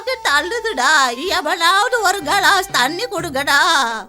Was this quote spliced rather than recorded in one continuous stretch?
no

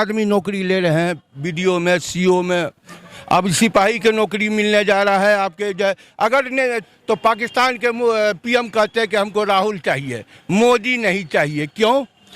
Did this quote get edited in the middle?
yes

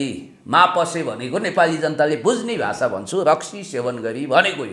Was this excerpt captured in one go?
yes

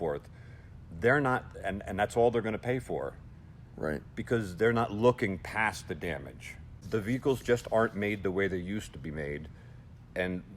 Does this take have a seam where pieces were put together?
yes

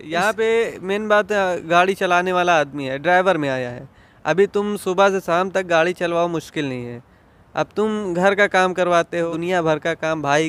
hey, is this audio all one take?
no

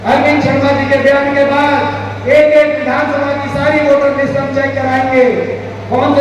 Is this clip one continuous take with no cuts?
yes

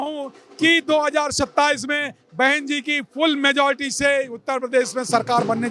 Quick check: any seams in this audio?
no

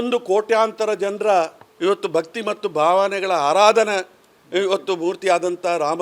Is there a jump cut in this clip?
no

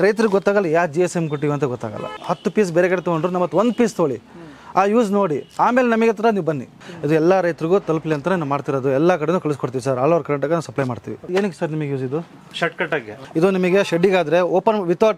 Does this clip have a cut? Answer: yes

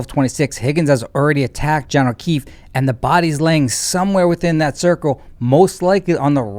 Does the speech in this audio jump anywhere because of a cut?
no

